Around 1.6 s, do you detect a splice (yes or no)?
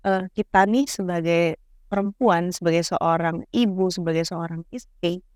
no